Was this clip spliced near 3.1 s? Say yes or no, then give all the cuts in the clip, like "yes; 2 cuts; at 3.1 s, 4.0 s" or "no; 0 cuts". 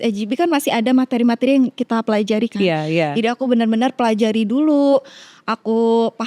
no; 0 cuts